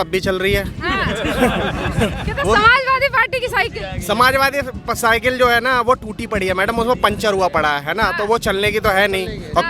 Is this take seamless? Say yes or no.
yes